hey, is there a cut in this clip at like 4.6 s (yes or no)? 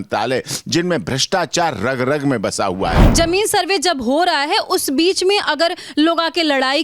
no